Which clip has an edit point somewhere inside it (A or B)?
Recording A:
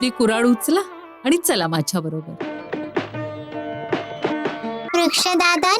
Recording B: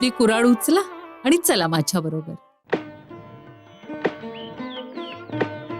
A